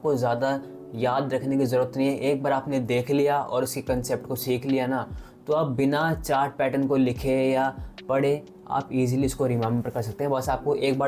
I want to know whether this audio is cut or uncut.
uncut